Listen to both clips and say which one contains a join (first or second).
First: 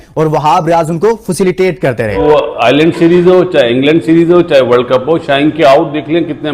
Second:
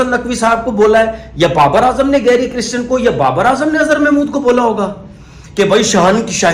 first